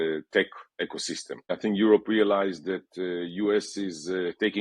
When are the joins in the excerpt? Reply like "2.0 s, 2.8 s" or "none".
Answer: 1.6 s